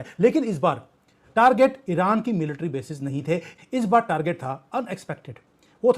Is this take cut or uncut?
cut